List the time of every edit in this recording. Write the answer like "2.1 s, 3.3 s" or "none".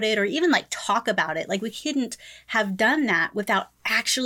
none